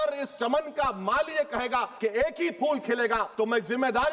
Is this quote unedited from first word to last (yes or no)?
no